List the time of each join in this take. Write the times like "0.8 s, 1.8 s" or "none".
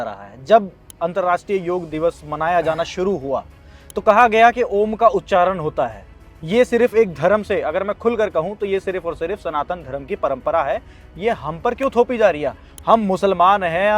1.9 s